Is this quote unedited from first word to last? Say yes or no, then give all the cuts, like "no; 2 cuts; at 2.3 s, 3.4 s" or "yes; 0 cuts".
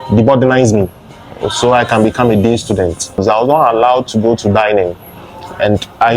no; 1 cut; at 3.2 s